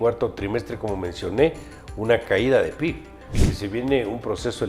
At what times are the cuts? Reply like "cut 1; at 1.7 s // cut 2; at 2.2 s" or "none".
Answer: cut 1; at 3.4 s

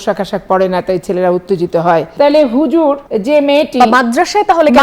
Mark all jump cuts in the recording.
cut 1; at 2.1 s // cut 2; at 3.1 s

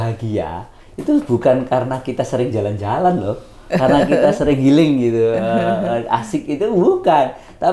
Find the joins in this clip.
none

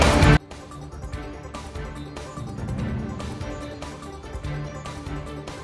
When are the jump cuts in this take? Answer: cut 1; at 1.6 s

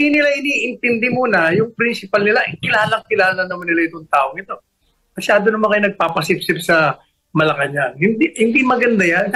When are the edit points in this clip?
none

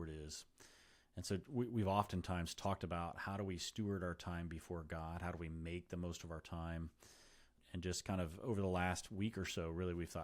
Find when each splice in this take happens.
cut 1; at 7.6 s

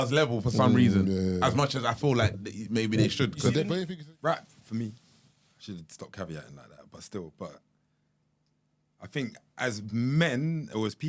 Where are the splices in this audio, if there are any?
cut 1; at 3.8 s

